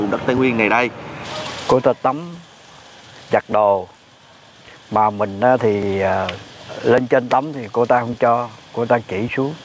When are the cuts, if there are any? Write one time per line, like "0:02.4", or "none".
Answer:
0:00.9